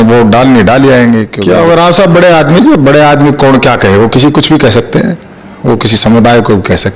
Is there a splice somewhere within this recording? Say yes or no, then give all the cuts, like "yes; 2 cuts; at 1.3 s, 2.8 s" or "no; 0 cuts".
yes; 1 cut; at 1.3 s